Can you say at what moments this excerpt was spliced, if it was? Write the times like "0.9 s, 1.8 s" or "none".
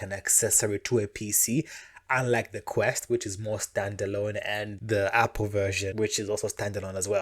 4.7 s, 5.9 s